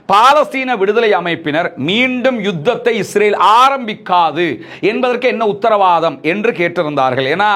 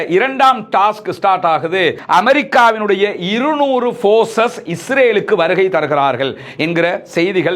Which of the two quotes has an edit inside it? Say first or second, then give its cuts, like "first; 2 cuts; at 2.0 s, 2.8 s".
second; 1 cut; at 2.0 s